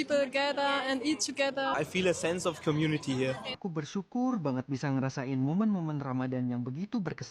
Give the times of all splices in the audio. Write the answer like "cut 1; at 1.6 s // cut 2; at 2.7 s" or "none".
cut 1; at 1.7 s // cut 2; at 3.5 s